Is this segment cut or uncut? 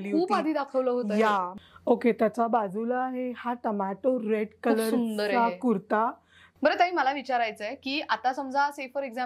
cut